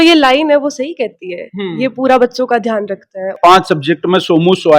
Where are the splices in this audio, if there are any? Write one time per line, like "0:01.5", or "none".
0:03.3